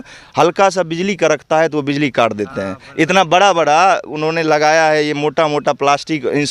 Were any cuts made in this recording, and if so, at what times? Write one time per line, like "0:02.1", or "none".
none